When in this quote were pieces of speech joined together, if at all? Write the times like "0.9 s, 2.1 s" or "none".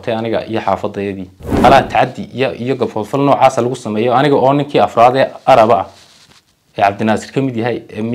1.6 s